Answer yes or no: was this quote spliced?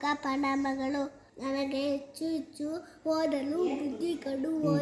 yes